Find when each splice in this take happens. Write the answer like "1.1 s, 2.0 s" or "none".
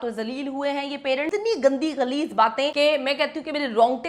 1.3 s, 2.7 s